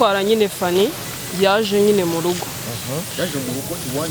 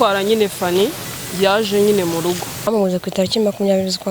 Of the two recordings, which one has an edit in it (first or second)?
second